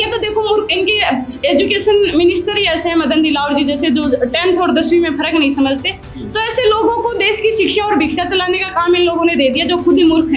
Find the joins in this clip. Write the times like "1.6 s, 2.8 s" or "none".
none

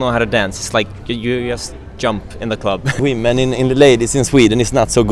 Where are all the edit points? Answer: 3.0 s

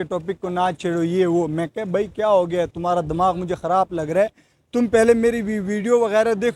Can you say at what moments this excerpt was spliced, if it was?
none

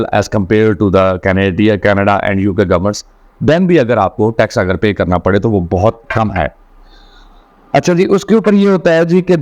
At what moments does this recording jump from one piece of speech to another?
none

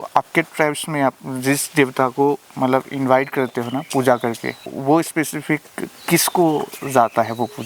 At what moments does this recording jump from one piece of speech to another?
4.7 s

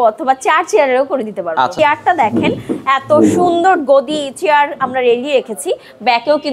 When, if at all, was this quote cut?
1.7 s

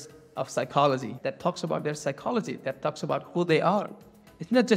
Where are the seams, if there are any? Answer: 1.1 s

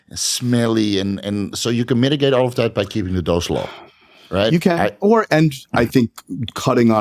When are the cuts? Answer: none

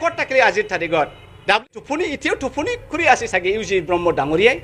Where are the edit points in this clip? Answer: 1.8 s

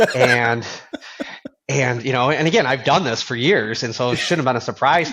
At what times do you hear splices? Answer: none

